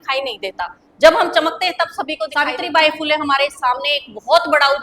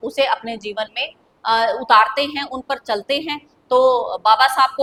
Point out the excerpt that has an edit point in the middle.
first; 1 cut; at 2.4 s

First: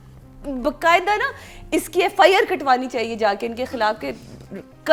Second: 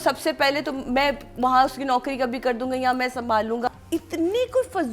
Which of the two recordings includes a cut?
second; 1 cut; at 3.7 s

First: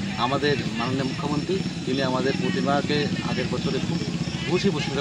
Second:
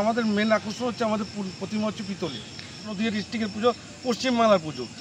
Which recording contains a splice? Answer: second; 1 cut; at 2.9 s

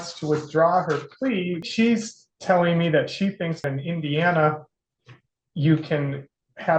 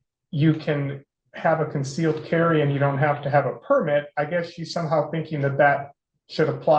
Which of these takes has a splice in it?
first; 2 cuts; at 1.6 s, 3.7 s

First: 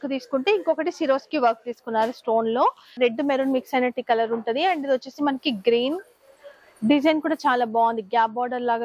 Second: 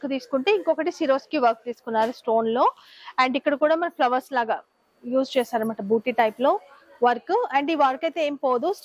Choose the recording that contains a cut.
first; 1 cut; at 2.9 s

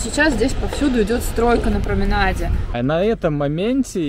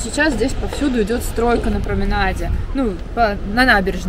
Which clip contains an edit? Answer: first; 1 cut; at 2.6 s

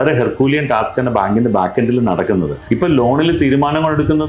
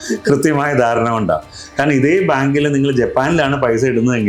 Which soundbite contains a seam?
first; 1 cut; at 2.6 s

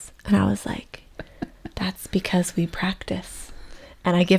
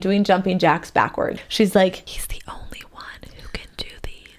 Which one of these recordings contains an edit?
second; 2 cuts; at 1.4 s, 2.1 s

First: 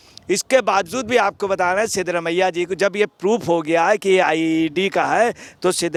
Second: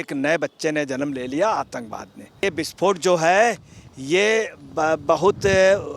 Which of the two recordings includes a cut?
second; 1 cut; at 2.4 s

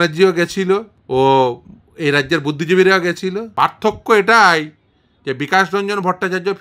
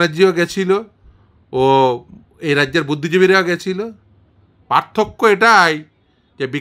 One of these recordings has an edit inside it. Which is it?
first; 2 cuts; at 0.9 s, 3.5 s

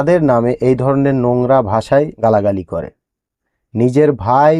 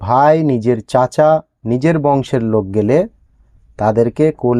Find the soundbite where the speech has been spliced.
first; 1 cut; at 2.1 s

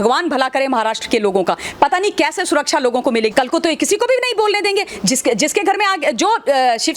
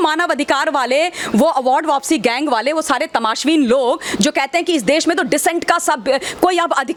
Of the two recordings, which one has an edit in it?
first; 1 cut; at 3.3 s

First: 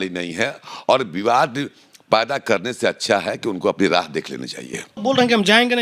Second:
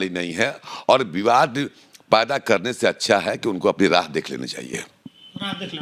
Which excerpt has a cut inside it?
first; 1 cut; at 4.8 s

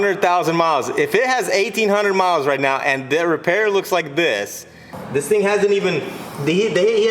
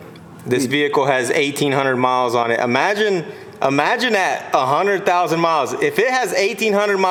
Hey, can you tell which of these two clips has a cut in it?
first; 1 cut; at 4.9 s

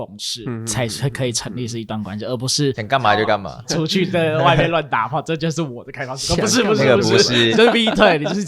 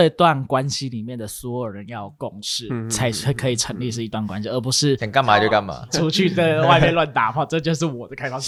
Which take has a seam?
first; 1 cut; at 7.5 s

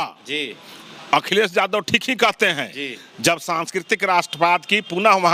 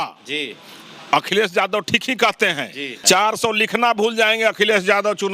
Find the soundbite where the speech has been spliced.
second; 1 cut; at 2.9 s

